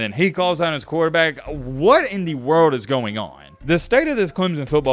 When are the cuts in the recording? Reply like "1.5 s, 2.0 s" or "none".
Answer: none

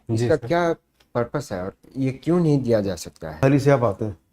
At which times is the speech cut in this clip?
3.4 s

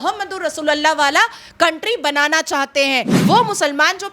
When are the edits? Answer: 3.1 s

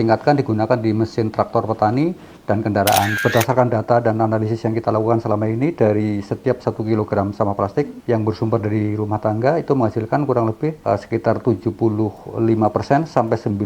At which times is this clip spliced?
3.1 s, 8.0 s, 10.8 s

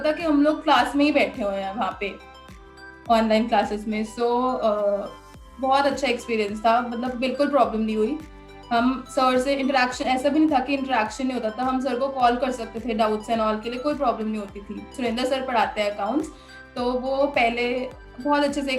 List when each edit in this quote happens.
14.9 s

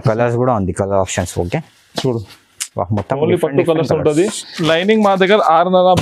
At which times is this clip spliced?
4.5 s

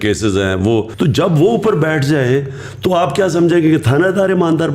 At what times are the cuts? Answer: 0.9 s

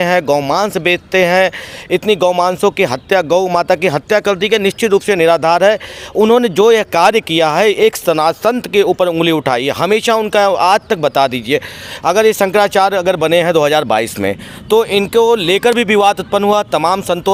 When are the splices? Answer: none

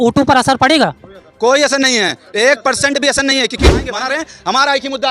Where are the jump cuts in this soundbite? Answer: 3.7 s

